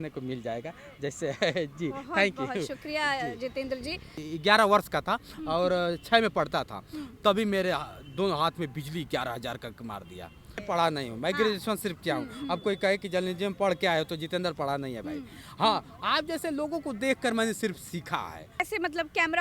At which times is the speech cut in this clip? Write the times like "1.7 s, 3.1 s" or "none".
4.3 s, 10.6 s, 18.6 s